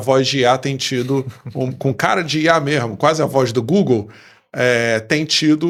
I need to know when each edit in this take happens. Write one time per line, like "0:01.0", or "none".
none